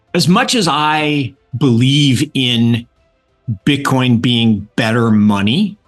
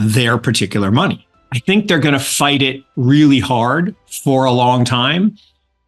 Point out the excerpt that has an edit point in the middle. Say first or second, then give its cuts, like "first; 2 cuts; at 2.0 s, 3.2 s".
second; 1 cut; at 1.5 s